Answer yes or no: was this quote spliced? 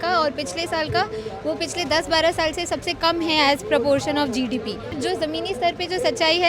yes